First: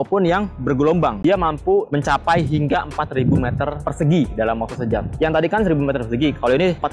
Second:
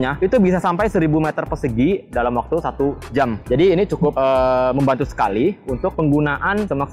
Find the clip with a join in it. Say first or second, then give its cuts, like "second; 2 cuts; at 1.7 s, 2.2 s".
first; 1 cut; at 1.2 s